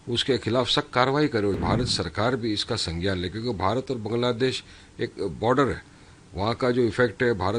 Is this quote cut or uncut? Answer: cut